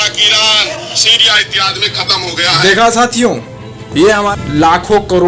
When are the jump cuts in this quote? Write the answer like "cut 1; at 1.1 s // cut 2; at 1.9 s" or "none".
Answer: cut 1; at 4.3 s